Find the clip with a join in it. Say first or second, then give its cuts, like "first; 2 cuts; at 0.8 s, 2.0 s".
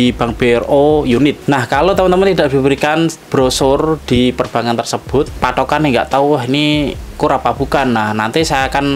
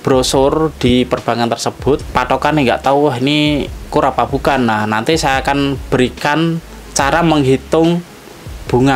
first; 1 cut; at 1.4 s